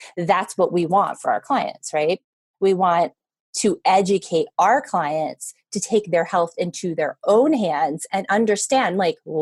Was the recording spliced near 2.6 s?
no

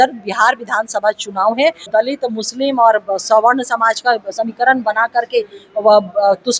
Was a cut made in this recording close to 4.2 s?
no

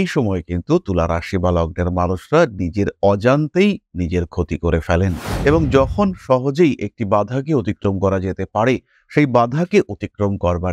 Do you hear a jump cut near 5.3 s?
yes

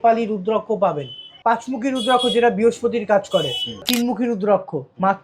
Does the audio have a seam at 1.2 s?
yes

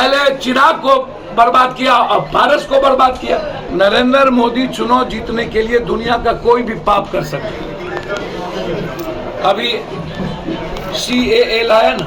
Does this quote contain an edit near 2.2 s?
no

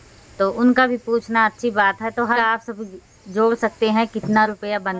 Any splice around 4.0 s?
no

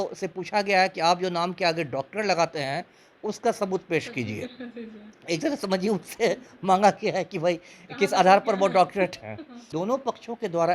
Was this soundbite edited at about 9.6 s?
yes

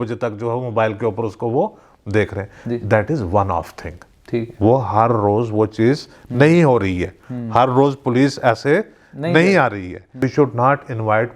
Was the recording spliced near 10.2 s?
yes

